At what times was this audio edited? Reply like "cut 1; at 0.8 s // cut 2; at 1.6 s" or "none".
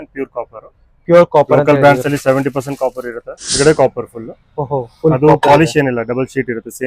cut 1; at 3.6 s